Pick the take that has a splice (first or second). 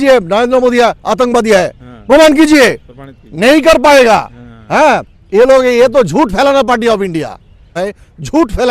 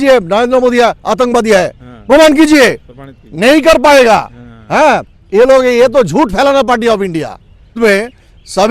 second